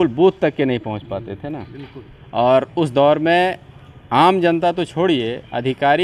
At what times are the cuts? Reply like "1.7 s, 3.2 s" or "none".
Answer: none